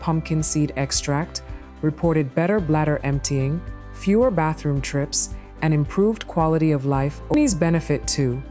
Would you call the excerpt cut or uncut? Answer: cut